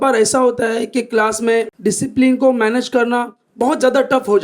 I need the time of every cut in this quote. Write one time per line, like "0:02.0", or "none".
0:01.7